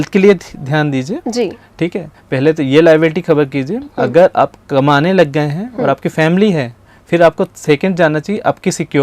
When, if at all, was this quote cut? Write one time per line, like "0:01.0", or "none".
none